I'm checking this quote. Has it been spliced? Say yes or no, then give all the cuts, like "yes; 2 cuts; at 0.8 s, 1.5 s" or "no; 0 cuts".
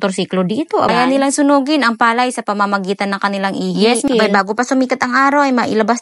yes; 2 cuts; at 0.9 s, 4.1 s